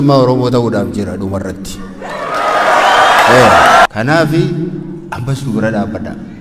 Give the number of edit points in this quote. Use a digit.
1